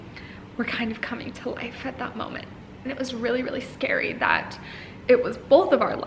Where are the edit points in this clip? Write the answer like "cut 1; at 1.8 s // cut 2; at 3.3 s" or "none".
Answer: cut 1; at 2.7 s